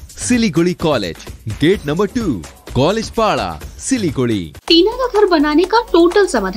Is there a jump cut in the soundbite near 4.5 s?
yes; 1 cut; at 4.5 s

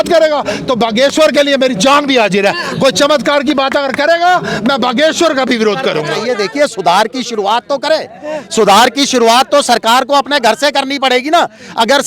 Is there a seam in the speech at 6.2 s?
yes; 1 cut; at 6.2 s

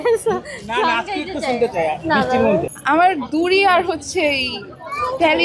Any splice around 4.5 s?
no; 1 cut; at 2.7 s

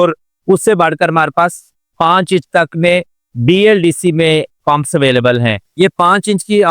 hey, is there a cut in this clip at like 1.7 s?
no; 1 cut; at 5.6 s

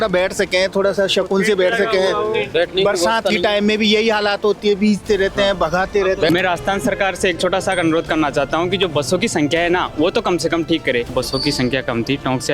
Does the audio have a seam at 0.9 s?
no; 2 cuts; at 6.3 s, 11.1 s

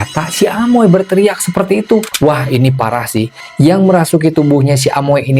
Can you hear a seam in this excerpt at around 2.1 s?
yes; 1 cut; at 2.1 s

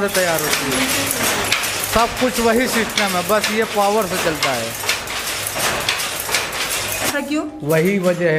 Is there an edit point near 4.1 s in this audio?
no; 1 cut; at 7.1 s

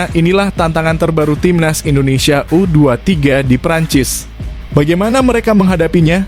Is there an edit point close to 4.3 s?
no; 0 cuts

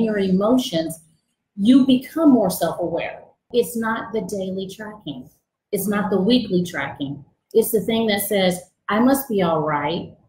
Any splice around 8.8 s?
no; 1 cut; at 3.5 s

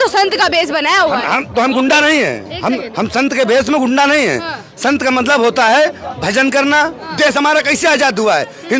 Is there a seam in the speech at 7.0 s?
yes; 1 cut; at 7.0 s

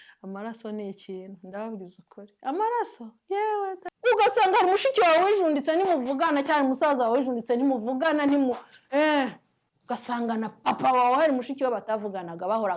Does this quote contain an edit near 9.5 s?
no; 1 cut; at 3.9 s

